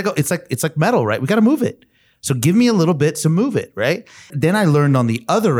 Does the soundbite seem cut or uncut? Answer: cut